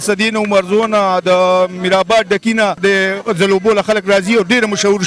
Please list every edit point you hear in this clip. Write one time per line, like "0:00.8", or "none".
0:02.8